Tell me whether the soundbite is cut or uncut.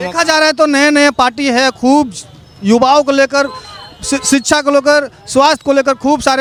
uncut